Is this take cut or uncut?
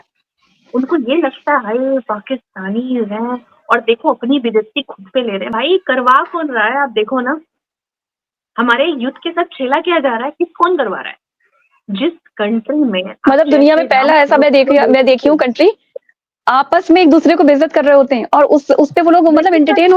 uncut